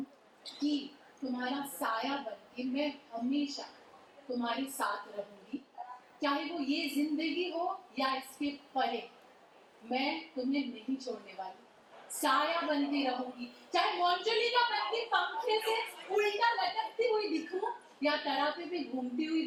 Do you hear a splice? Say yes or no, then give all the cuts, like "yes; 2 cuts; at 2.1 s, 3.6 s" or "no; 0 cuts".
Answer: no; 0 cuts